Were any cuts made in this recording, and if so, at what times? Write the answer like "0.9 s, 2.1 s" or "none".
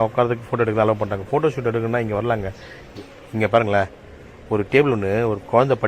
2.9 s